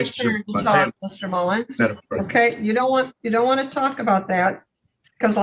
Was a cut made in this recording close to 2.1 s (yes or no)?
no